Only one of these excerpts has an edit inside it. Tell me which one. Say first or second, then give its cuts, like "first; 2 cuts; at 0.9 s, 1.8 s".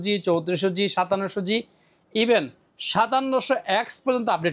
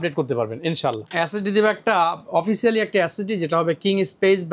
second; 1 cut; at 1.0 s